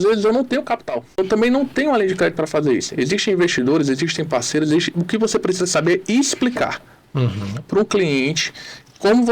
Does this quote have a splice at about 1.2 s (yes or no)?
yes